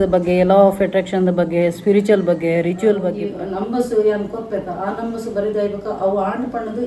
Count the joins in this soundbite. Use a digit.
1